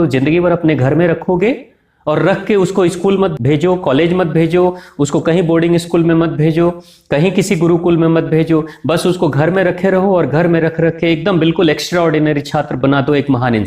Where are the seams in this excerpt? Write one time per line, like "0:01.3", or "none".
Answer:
0:03.3